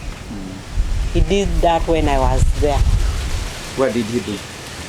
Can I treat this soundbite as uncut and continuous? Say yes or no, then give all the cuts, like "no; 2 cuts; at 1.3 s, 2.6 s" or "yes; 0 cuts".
yes; 0 cuts